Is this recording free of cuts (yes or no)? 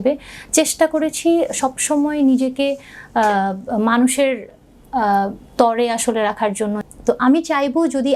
no